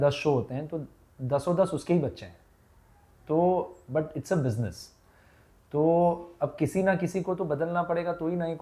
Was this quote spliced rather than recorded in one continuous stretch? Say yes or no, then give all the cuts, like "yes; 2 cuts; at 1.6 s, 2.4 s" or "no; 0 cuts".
no; 0 cuts